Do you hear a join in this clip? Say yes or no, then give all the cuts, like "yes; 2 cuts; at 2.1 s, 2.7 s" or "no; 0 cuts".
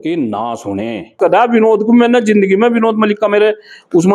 yes; 1 cut; at 1.1 s